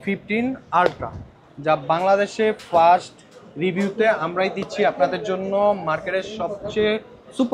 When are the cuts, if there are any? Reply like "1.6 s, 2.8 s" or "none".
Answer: none